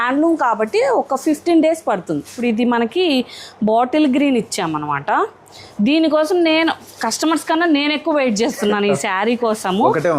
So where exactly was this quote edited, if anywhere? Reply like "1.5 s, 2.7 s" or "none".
2.3 s